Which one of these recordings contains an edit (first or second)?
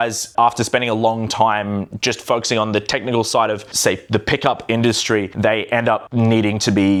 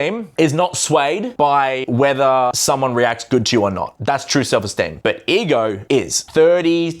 second